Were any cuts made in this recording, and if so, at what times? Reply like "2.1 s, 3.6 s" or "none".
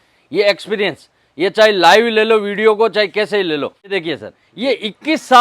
3.9 s

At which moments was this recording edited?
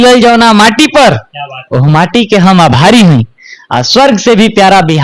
none

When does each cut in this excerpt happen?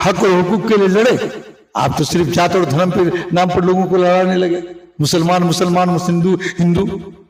none

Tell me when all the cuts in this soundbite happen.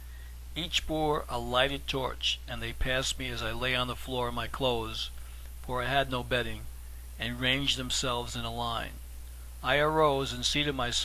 8.3 s

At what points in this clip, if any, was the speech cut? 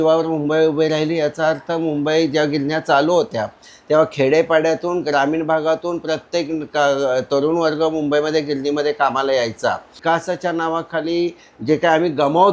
10.0 s

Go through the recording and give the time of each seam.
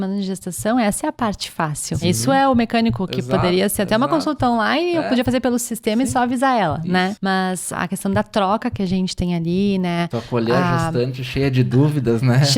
2.0 s, 7.6 s

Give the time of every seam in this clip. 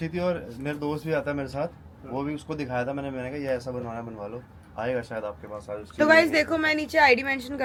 none

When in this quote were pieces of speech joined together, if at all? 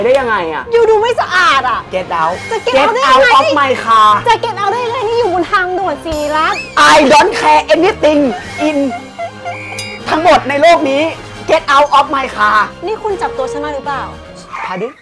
none

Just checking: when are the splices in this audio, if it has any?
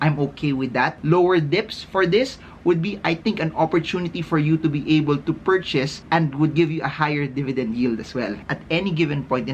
1.0 s, 6.0 s, 8.4 s

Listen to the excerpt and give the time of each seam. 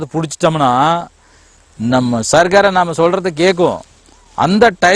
none

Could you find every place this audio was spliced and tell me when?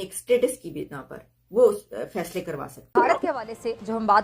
2.9 s

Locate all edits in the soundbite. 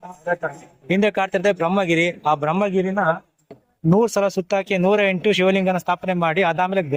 none

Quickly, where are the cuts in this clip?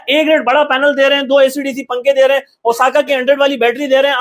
none

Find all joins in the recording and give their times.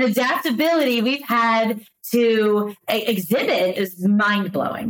3.7 s

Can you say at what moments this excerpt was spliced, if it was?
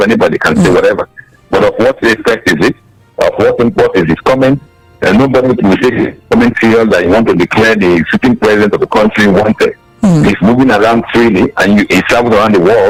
none

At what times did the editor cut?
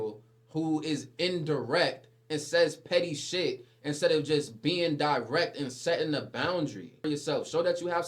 7.0 s

